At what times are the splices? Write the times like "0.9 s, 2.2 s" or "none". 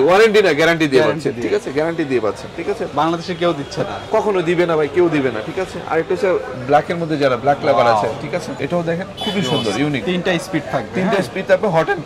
none